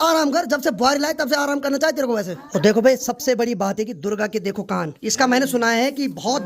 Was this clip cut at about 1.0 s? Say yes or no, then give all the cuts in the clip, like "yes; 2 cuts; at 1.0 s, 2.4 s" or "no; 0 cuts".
no; 2 cuts; at 2.5 s, 5.0 s